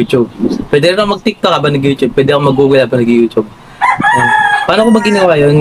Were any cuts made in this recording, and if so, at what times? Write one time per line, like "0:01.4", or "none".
0:03.6

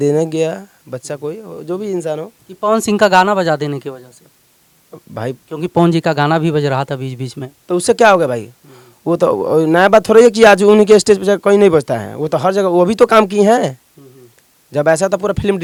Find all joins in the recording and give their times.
none

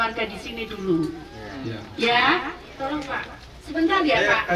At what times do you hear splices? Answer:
0:02.6

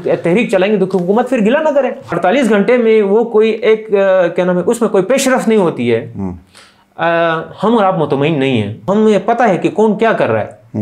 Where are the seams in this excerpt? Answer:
0:02.1
0:08.8

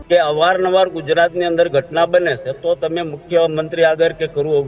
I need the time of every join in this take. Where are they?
none

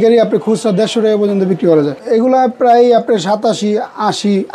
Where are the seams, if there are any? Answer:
0:02.0

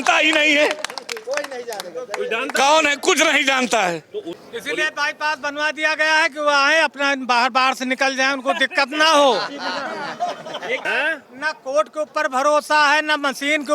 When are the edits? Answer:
0:04.3
0:10.8

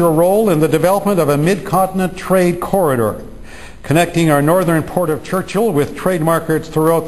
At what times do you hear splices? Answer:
0:03.3

